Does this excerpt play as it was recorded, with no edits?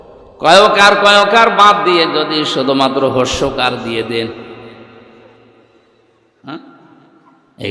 yes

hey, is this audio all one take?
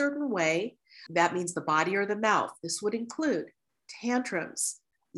no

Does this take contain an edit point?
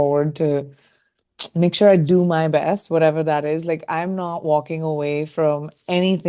no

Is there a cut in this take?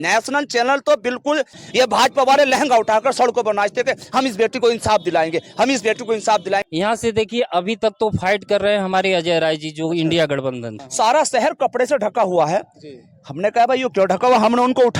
yes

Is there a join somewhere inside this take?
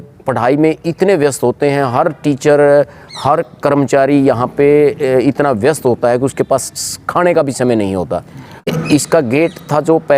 yes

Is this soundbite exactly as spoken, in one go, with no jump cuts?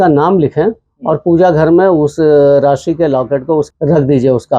no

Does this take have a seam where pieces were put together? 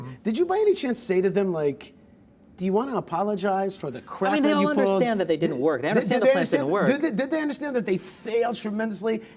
no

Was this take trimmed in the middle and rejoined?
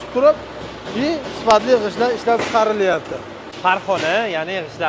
yes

